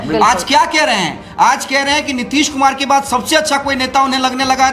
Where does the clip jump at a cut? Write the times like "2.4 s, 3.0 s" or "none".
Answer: none